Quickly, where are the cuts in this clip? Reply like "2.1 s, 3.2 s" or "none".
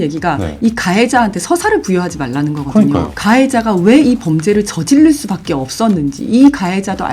3.1 s